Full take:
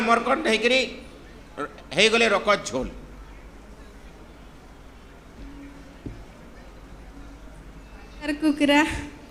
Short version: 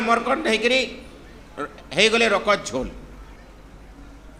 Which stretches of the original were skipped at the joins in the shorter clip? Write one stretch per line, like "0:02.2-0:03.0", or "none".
0:03.4-0:06.6